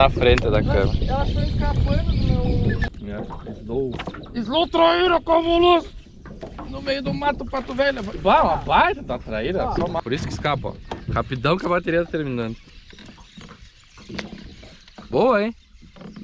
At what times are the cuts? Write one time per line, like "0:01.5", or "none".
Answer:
0:02.9
0:10.0